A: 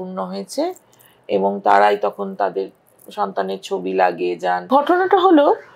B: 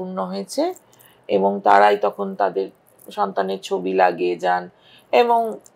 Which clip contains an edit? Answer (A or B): A